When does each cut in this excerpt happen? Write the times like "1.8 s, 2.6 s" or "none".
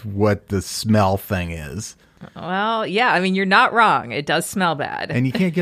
2.2 s